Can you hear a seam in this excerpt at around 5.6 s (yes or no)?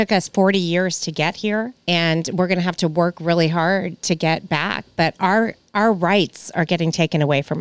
no